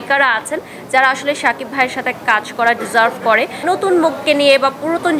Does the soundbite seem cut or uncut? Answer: cut